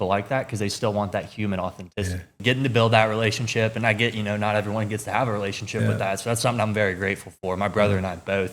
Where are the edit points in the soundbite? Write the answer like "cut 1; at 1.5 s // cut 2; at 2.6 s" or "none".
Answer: cut 1; at 2.4 s